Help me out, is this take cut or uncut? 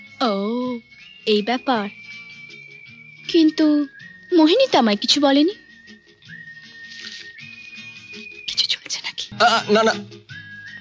cut